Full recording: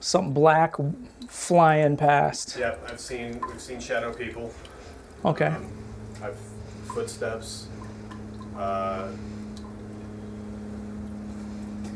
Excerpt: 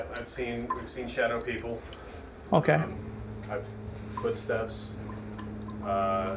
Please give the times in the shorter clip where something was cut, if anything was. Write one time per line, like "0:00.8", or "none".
none

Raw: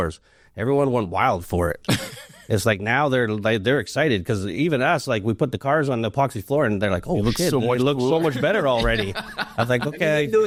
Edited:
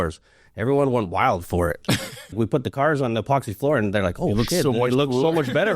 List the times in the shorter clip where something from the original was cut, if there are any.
0:02.3

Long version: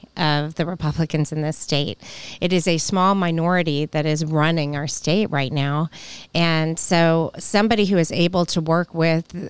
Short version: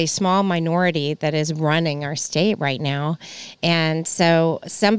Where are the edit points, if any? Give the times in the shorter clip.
none

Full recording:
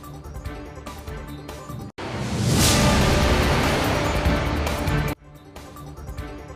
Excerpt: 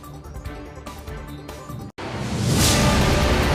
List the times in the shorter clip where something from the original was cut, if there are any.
none

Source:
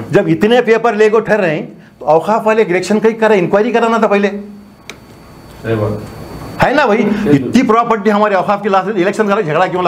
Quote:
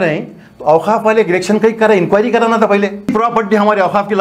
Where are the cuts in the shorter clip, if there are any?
0:03.1

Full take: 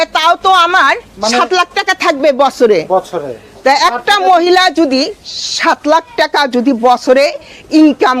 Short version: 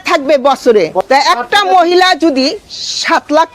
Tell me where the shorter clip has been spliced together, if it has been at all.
0:01.0

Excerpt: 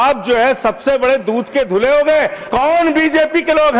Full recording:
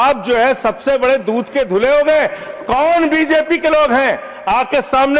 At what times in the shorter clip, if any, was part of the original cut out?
0:02.4

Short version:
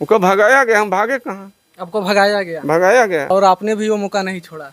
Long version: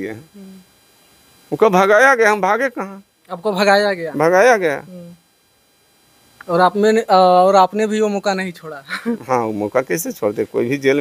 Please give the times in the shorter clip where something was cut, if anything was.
0:03.3

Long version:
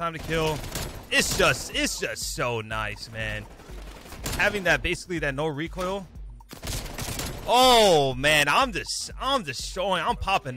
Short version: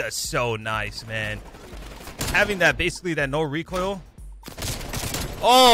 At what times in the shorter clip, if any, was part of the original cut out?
none

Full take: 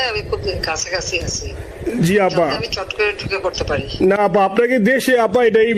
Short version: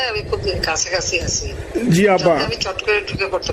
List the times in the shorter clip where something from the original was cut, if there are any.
0:01.6

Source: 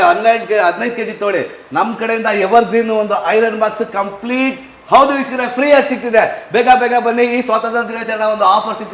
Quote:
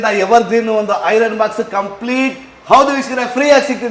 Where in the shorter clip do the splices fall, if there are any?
none

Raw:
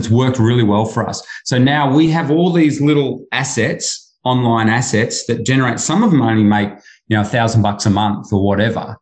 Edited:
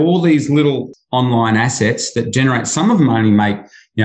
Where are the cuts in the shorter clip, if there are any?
0:00.9

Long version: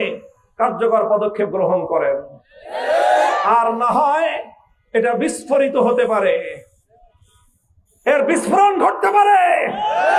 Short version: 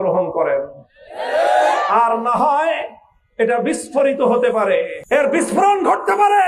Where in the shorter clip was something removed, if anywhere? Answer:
0:05.0

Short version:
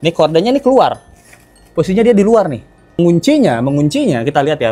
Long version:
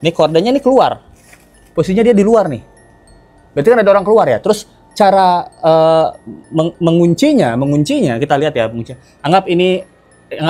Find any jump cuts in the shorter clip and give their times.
0:03.0

